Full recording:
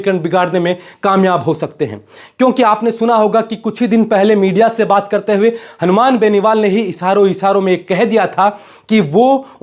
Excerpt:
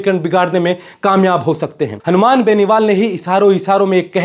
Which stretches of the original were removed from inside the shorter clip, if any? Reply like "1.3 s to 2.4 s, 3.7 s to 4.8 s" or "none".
1.9 s to 5.7 s